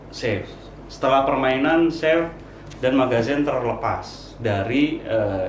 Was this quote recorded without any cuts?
yes; 0 cuts

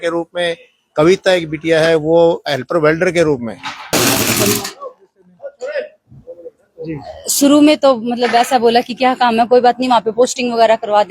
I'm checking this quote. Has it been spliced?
yes; 1 cut; at 3.9 s

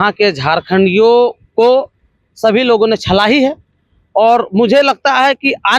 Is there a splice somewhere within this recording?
no; 0 cuts

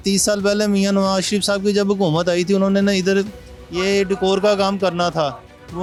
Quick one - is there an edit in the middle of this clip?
no; 0 cuts

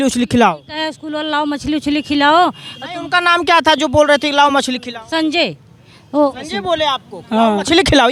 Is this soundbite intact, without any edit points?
yes; 0 cuts

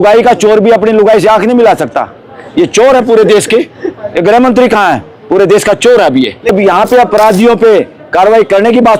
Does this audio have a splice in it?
yes; 1 cut; at 6.5 s

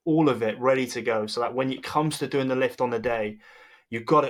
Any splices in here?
no; 0 cuts

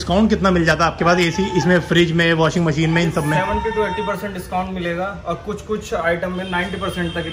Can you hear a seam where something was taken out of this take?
no; 0 cuts

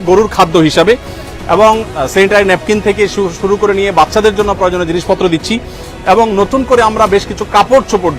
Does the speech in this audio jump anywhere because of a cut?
no; 0 cuts

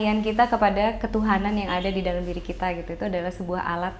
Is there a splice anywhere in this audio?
no; 0 cuts

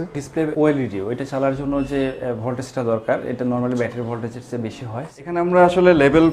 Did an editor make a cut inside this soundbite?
yes; 1 cut; at 5.1 s

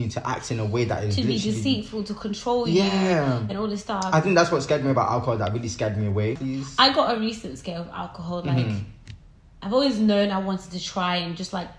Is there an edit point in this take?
no; 0 cuts

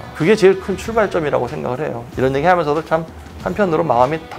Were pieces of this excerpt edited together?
yes; 1 cut; at 2.0 s

